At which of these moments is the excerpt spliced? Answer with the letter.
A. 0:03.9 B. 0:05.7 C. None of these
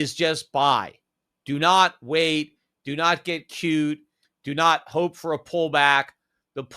C